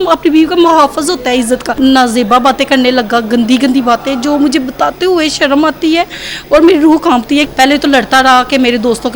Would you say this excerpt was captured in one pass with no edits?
no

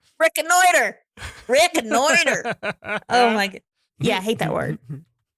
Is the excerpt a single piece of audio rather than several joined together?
no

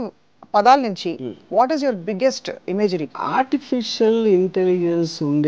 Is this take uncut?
no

